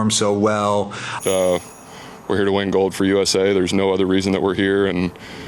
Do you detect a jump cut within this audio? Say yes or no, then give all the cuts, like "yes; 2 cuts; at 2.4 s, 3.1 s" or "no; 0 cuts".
yes; 1 cut; at 1.1 s